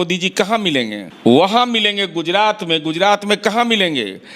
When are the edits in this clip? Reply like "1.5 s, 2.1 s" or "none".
1.0 s